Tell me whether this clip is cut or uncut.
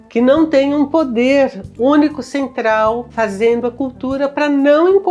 uncut